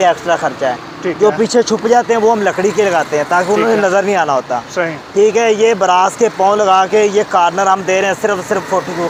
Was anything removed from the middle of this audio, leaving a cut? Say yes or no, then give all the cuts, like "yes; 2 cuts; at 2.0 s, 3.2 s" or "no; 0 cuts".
no; 0 cuts